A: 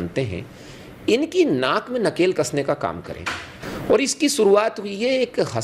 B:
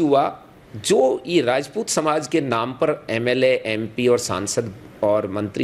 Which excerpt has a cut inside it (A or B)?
A